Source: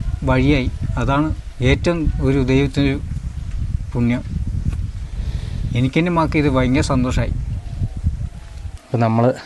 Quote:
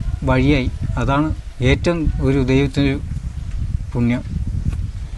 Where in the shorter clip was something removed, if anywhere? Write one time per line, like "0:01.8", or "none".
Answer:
none